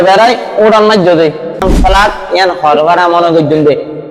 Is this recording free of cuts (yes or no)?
no